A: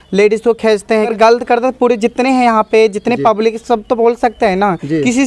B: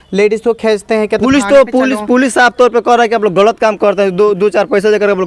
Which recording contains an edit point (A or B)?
A